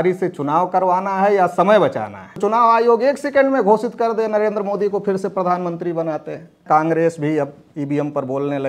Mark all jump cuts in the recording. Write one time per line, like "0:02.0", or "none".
0:02.4
0:06.6